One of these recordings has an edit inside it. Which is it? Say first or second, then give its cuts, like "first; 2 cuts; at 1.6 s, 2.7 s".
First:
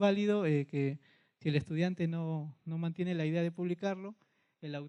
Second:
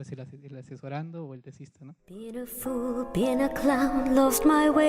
second; 1 cut; at 2.2 s